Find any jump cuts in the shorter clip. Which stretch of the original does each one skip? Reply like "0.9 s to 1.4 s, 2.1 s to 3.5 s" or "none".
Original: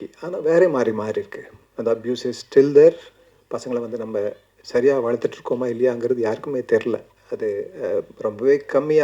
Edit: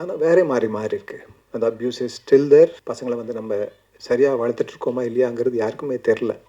3.1 s to 3.5 s